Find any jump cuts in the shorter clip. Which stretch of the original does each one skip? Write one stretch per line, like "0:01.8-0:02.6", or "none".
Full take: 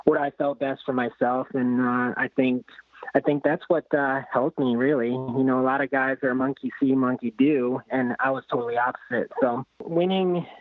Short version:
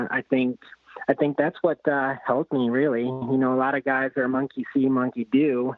none

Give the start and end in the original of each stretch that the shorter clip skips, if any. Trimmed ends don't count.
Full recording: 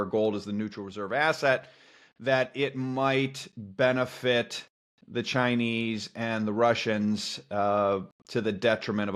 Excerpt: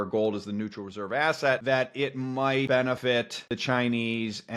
0:01.6-0:02.2
0:03.6-0:04.6

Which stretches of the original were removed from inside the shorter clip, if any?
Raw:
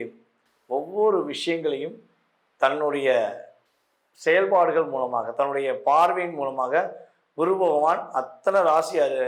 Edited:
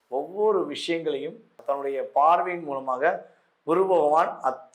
0:02.2-0:05.3

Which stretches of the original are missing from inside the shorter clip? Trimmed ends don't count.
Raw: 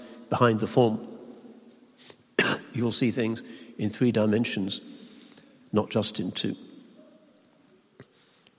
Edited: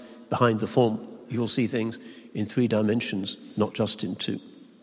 0:01.2-0:02.7
0:04.8-0:05.6

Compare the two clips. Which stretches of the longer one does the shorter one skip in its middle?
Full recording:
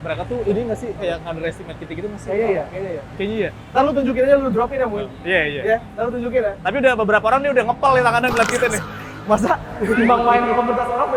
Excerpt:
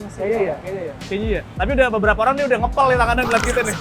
0:03.6-0:06.6

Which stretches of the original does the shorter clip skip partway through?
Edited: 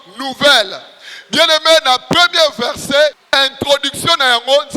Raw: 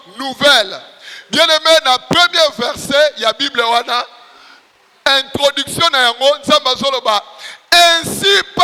0:03.2-0:04.9

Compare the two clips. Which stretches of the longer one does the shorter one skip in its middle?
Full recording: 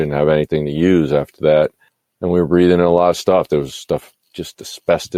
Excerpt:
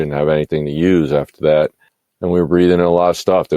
none

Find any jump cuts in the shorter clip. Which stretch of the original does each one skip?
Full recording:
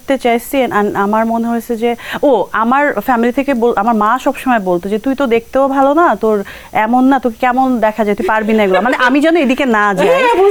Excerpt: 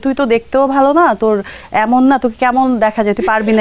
none

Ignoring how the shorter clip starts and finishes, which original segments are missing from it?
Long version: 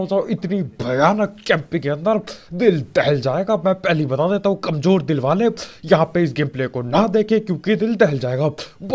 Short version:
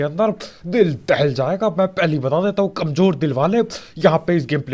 none

